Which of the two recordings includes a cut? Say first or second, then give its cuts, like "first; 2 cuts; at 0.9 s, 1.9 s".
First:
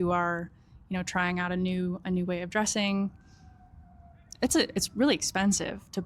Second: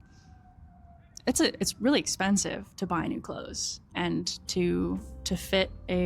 second; 1 cut; at 3.9 s